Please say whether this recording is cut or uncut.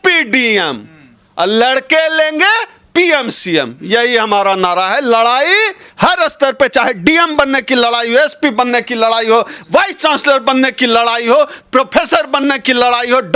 uncut